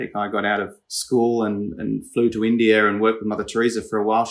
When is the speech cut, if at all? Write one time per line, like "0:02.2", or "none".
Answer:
none

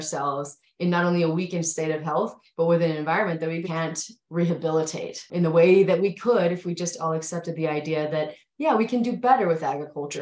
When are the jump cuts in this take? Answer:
0:03.7
0:05.2

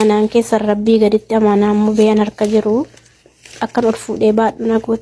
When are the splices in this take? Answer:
none

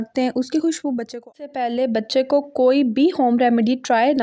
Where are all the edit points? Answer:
0:01.4

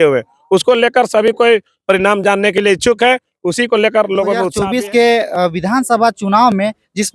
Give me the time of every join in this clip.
0:04.5

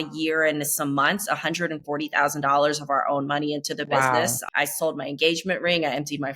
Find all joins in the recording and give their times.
0:04.4

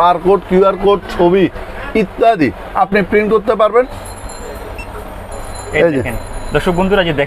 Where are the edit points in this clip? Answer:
0:04.0

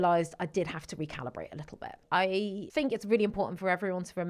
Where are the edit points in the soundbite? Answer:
0:02.0
0:02.6

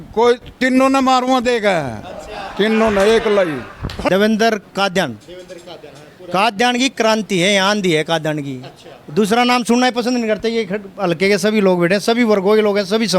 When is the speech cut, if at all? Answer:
0:03.9

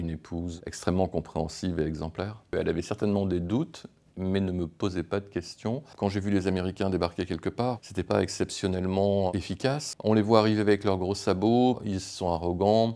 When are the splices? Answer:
0:02.5
0:05.9
0:09.9

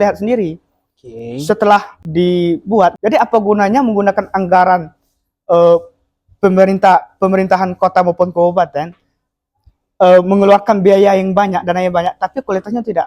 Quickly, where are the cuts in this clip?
0:02.0
0:03.0

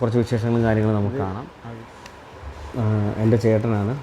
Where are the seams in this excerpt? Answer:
0:01.4

